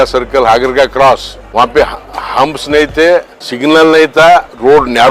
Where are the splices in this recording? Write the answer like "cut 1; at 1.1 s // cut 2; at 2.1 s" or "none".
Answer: cut 1; at 1.4 s // cut 2; at 3.4 s